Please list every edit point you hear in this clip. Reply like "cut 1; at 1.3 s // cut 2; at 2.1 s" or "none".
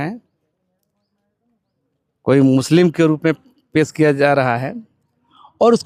none